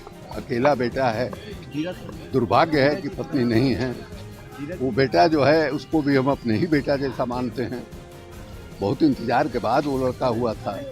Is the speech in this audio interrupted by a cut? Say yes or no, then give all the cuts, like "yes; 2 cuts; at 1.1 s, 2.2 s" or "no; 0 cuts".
no; 0 cuts